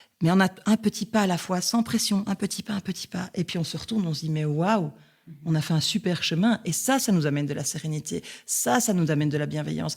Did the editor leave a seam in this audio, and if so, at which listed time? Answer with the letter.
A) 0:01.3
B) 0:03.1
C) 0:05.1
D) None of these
D